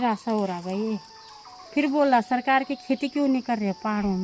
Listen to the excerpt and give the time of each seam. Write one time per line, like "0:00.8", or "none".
none